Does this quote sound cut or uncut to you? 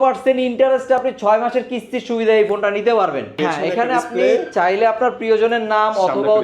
cut